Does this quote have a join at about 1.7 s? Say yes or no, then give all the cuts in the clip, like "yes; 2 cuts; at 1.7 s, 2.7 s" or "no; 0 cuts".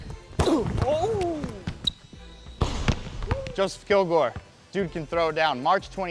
yes; 1 cut; at 1.7 s